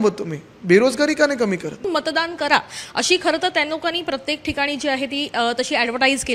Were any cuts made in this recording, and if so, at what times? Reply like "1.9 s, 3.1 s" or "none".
1.8 s

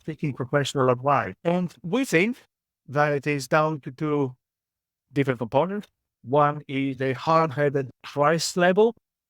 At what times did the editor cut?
1.3 s

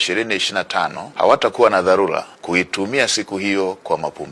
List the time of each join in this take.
1.0 s, 2.3 s

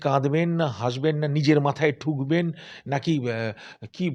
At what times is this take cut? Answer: none

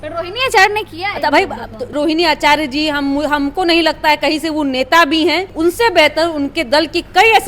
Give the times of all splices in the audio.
1.9 s, 5.5 s

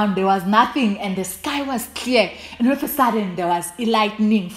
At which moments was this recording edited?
none

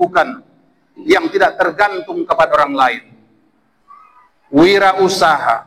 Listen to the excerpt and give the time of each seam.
1.0 s

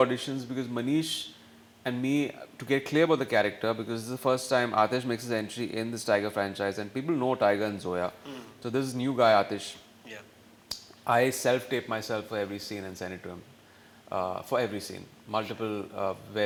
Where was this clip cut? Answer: none

